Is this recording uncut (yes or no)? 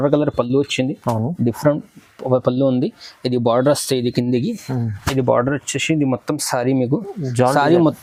yes